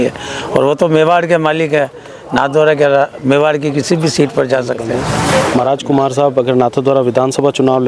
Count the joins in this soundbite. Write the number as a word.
one